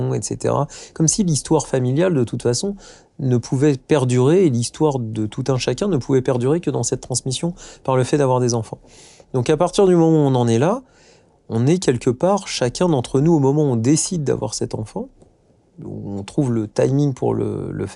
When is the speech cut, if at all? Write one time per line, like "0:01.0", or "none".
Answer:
none